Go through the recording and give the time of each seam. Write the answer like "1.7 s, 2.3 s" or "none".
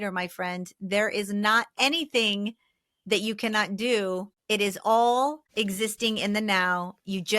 4.3 s, 5.4 s